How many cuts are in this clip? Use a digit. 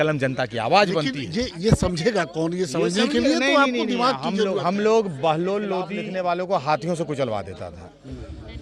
1